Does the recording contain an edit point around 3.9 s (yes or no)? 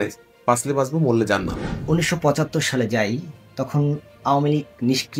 no